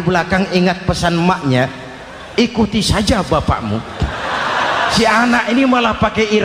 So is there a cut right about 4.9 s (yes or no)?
yes